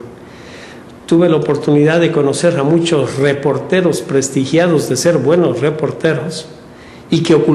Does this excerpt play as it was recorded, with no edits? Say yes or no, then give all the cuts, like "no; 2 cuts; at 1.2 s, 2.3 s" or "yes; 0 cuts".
yes; 0 cuts